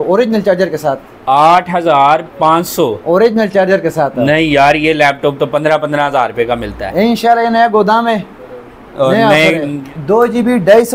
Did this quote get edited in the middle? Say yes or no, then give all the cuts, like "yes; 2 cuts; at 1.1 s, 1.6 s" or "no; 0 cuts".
yes; 1 cut; at 9.7 s